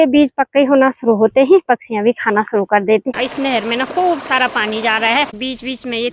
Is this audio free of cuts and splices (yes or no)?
no